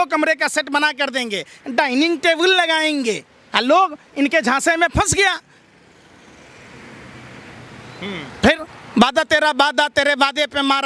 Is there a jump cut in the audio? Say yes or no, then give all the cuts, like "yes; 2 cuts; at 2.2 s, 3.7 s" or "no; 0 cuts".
no; 0 cuts